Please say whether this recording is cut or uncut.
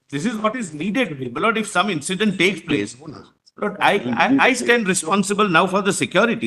uncut